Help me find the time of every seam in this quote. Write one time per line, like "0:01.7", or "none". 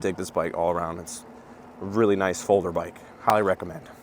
none